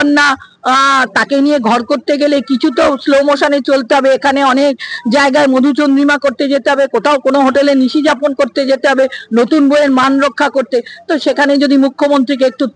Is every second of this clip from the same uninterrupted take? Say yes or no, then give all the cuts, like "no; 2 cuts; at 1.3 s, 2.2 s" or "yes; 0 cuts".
yes; 0 cuts